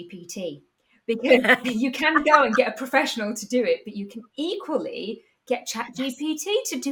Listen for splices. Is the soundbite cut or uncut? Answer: uncut